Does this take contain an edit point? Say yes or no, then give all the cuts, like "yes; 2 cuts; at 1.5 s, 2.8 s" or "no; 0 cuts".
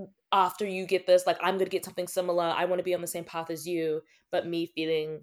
no; 0 cuts